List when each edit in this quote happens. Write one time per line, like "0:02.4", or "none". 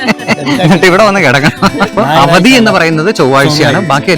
0:01.9